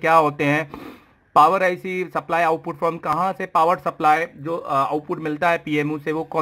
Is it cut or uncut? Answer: uncut